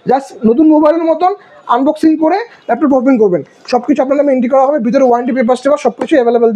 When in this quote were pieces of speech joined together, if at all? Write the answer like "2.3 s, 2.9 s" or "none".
none